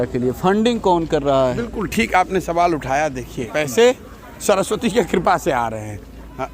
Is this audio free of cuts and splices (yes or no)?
no